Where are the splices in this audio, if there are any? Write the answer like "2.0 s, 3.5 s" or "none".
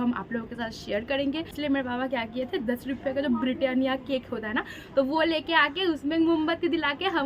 1.5 s